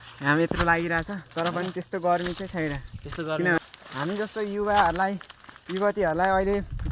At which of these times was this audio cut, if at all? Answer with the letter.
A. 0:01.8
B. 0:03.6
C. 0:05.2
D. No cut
B